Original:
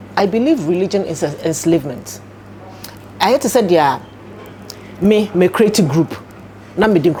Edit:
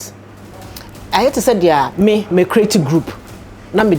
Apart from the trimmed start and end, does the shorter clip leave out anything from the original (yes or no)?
yes